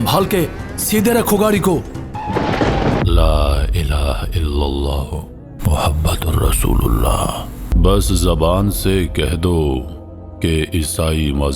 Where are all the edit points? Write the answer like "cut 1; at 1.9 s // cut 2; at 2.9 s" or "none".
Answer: cut 1; at 3.0 s // cut 2; at 7.7 s